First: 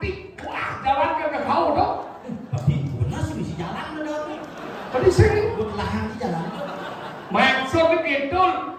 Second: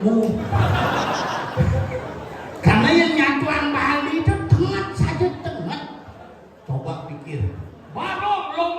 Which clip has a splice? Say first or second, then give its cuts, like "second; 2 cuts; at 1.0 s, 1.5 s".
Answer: second; 1 cut; at 7.8 s